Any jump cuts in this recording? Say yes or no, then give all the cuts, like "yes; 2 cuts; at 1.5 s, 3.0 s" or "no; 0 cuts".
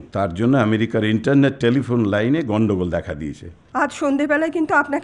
yes; 1 cut; at 3.6 s